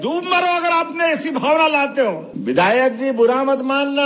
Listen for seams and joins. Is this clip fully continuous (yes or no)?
no